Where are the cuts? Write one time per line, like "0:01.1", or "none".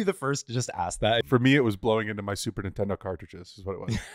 0:01.2